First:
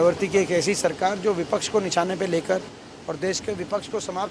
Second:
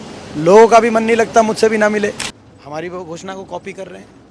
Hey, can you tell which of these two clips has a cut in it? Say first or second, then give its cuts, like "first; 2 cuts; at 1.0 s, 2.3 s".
second; 1 cut; at 2.3 s